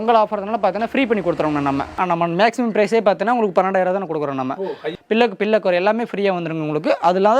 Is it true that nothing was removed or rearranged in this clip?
no; 2 cuts; at 1.9 s, 4.9 s

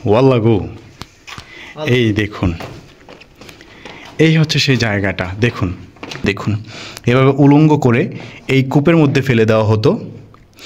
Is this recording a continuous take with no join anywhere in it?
no; 1 cut; at 6.2 s

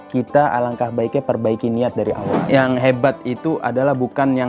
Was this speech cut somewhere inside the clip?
yes; 1 cut; at 2.4 s

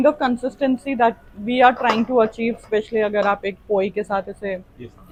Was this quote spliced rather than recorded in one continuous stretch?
no; 0 cuts

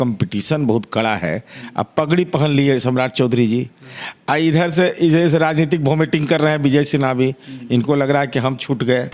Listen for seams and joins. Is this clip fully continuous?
yes; 0 cuts

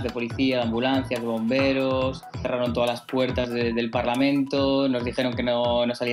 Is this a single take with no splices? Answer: yes; 0 cuts

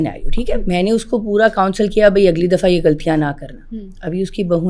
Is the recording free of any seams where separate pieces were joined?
yes; 0 cuts

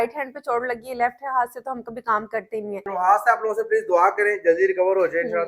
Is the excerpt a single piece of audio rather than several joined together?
no; 1 cut; at 2.8 s

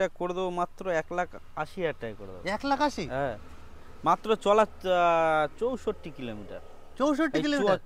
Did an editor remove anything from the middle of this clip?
no; 0 cuts

